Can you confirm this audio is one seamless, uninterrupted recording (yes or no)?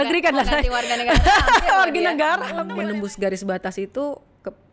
no